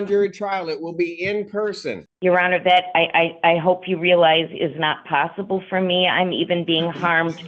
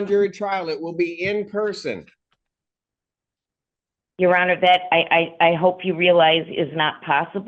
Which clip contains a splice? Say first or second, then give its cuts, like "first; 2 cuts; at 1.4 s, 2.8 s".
first; 1 cut; at 2.1 s